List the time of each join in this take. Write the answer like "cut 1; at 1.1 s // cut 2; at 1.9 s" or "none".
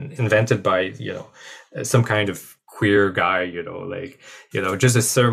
none